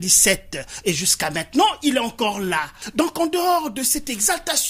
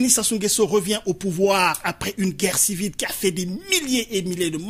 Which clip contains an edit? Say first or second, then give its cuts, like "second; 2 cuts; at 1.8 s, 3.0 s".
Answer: first; 1 cut; at 2.8 s